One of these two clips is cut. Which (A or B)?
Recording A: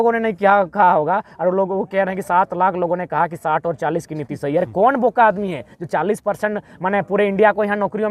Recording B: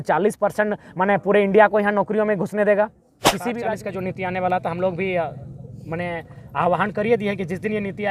B